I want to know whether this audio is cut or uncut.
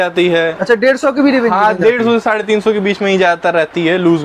uncut